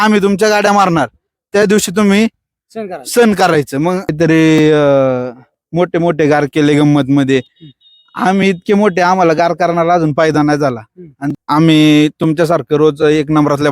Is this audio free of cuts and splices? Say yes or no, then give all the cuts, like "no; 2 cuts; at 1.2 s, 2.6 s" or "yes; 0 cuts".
no; 2 cuts; at 4.1 s, 11.3 s